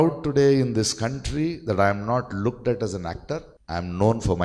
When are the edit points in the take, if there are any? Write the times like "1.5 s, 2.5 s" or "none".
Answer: 3.5 s